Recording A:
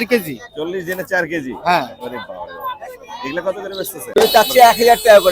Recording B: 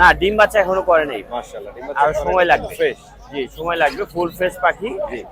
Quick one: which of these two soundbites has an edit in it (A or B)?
A